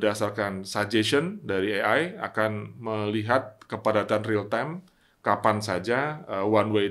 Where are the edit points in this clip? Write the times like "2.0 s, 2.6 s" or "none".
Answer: none